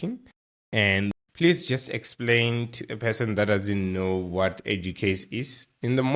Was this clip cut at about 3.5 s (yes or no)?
no